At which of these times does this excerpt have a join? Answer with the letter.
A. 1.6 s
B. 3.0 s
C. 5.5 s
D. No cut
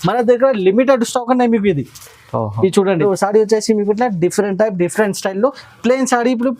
B